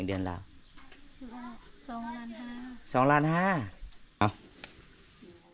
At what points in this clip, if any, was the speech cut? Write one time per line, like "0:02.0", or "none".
0:04.2